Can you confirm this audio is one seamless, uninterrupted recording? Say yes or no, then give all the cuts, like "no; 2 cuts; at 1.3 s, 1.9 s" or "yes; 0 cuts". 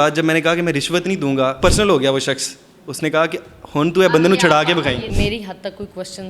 no; 2 cuts; at 1.6 s, 5.1 s